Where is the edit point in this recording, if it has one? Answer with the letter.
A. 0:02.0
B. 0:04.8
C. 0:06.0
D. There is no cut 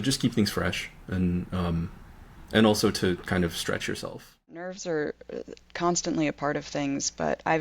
B